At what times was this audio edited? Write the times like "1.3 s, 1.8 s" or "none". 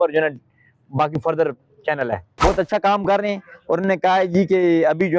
2.4 s